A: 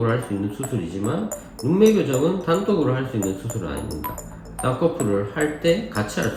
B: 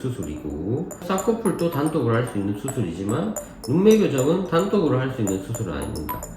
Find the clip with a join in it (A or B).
B